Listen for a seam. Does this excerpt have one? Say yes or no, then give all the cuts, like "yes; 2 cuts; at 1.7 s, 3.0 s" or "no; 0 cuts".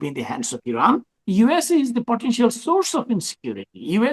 yes; 1 cut; at 1.1 s